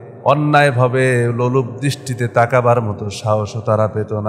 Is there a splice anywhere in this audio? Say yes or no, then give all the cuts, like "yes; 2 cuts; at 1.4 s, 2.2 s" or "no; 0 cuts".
no; 0 cuts